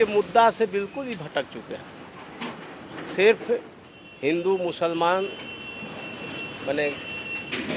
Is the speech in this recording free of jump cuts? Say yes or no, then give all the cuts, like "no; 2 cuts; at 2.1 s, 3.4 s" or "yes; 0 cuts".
yes; 0 cuts